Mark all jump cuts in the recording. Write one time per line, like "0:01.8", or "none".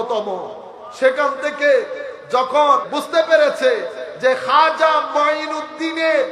0:02.9